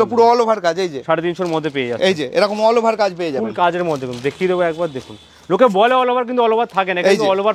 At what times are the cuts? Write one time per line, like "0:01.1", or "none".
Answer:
none